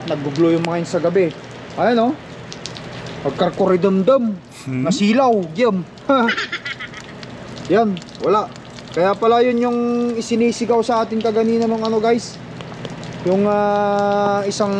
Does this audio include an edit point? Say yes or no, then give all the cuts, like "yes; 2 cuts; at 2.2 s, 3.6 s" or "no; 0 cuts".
no; 0 cuts